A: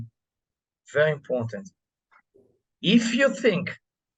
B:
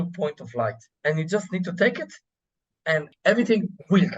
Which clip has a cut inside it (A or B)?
B